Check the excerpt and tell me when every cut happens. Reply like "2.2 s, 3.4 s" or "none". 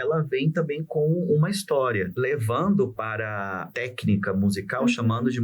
2.1 s, 3.7 s